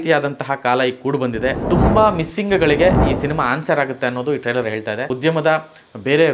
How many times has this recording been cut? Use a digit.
2